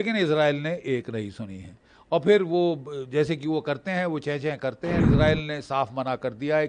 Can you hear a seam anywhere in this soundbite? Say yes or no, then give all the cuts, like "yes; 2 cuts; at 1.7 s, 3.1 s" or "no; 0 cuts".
yes; 1 cut; at 5.0 s